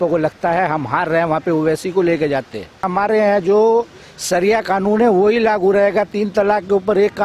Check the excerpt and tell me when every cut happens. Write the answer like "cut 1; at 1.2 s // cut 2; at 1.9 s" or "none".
cut 1; at 2.9 s